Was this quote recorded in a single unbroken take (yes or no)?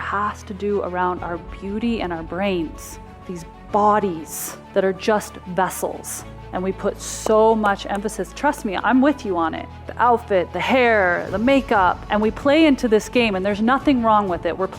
no